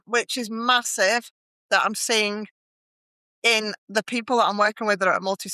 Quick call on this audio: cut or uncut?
uncut